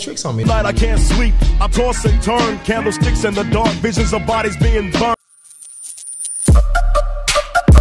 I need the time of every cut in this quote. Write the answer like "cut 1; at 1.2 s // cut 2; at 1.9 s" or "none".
cut 1; at 5.2 s